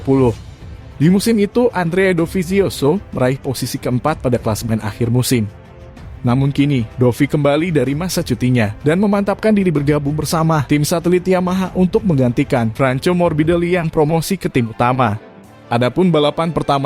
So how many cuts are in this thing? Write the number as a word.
zero